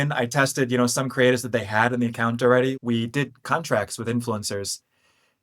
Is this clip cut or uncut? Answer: cut